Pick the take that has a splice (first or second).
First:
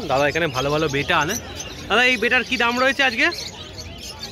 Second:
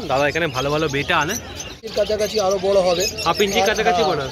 second